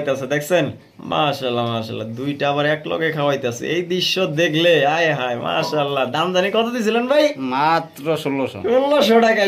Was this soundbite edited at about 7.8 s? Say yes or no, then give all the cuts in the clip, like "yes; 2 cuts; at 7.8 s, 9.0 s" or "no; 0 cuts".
no; 0 cuts